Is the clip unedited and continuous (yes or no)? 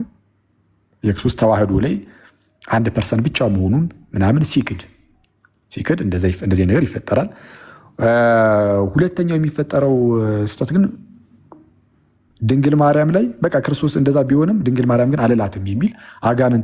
yes